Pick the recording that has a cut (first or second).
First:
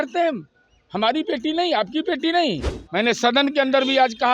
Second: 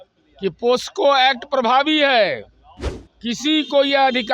first